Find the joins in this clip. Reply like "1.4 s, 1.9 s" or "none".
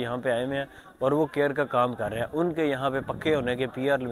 none